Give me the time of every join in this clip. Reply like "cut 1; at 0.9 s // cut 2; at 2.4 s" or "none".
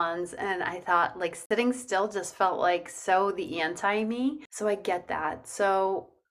cut 1; at 1.4 s // cut 2; at 4.5 s